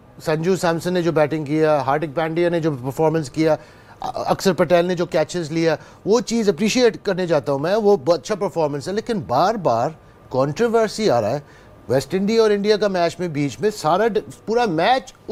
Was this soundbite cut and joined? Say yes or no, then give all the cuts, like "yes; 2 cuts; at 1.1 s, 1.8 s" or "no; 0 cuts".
no; 0 cuts